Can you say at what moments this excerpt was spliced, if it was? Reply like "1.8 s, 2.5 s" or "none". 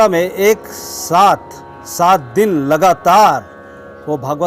2.3 s